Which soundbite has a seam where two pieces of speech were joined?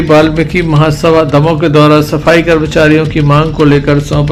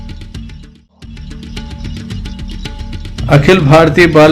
second; 2 cuts; at 1.2 s, 3.1 s

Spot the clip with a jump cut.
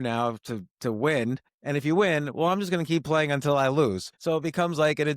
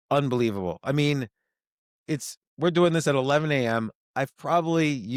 first; 2 cuts; at 1.5 s, 4.1 s

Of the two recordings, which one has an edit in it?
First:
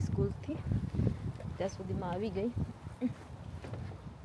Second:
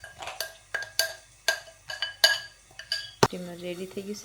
second; 1 cut; at 3.3 s

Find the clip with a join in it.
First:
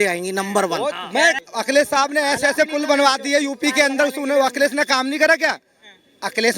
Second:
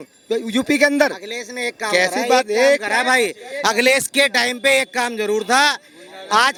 first; 1 cut; at 1.4 s

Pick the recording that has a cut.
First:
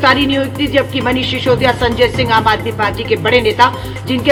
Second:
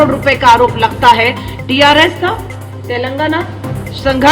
second; 1 cut; at 1.5 s

